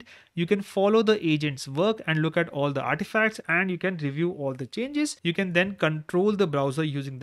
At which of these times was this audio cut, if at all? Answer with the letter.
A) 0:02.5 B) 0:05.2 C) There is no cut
B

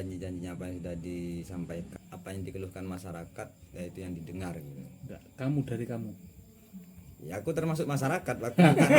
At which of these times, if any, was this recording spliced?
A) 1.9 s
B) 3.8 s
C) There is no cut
A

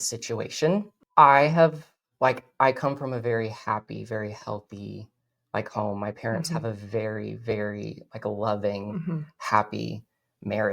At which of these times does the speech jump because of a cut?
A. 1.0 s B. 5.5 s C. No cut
A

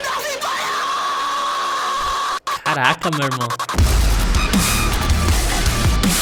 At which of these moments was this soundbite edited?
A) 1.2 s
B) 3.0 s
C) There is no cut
C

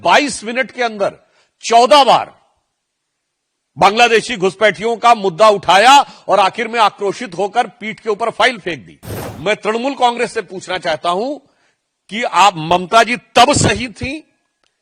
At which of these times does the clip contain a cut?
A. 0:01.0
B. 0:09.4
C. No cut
C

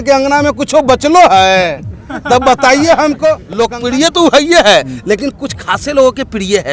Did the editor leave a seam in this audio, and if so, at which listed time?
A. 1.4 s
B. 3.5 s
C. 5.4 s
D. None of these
B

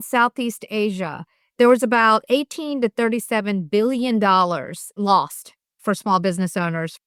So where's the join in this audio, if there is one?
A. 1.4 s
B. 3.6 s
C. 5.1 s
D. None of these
D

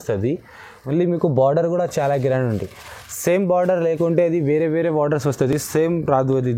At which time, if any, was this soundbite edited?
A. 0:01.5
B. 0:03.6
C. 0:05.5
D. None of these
D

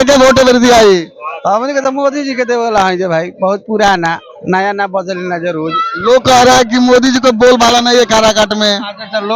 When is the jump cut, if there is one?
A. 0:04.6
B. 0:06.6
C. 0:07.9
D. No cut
D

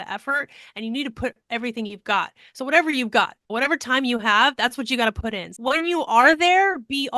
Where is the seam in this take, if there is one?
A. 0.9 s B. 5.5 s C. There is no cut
B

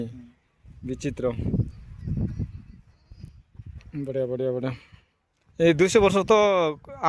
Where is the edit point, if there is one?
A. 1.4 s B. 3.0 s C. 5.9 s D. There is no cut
D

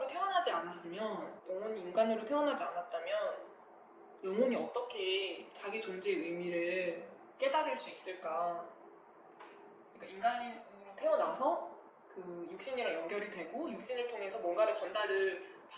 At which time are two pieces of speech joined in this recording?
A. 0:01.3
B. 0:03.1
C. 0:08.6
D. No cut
A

